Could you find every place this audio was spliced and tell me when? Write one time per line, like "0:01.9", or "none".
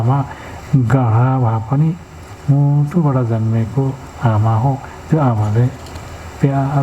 0:02.3